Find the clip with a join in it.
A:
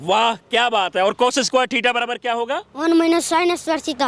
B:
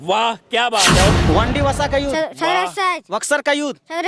B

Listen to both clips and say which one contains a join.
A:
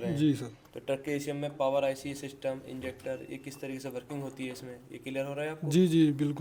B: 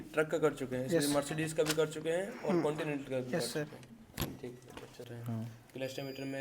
B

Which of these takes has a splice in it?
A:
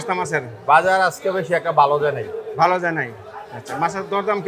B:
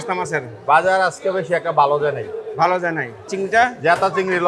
B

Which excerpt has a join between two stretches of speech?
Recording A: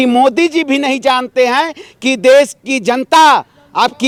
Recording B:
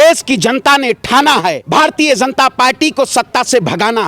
B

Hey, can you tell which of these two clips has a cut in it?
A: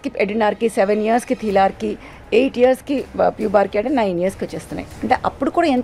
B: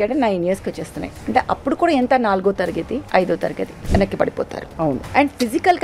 B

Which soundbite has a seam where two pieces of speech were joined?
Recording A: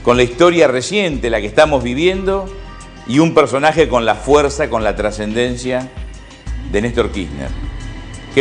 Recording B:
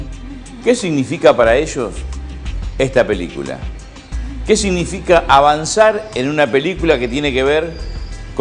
A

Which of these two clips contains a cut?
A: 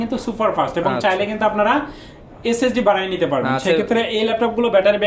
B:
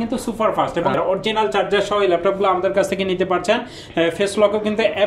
B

